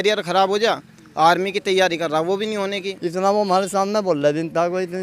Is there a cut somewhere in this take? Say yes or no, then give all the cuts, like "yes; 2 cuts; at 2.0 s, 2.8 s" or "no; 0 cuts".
yes; 1 cut; at 2.9 s